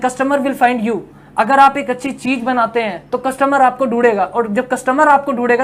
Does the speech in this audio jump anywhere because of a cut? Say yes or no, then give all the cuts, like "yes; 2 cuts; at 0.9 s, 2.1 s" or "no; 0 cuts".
no; 0 cuts